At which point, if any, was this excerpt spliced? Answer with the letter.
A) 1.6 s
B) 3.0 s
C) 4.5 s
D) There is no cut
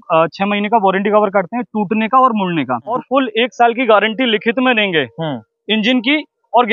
B